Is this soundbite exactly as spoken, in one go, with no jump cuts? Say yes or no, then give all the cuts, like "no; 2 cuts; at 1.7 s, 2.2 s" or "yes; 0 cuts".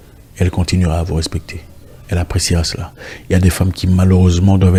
yes; 0 cuts